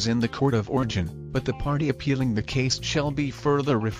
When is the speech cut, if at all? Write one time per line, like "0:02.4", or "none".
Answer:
none